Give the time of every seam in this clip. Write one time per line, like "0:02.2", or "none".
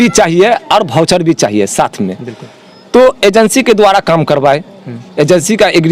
none